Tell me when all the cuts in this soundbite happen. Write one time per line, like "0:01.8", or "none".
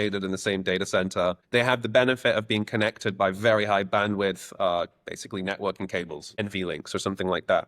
0:01.4
0:06.4